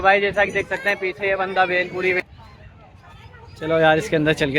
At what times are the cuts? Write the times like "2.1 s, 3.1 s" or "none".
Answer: 2.2 s